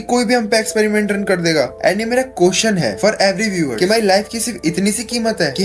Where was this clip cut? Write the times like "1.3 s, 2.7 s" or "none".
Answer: none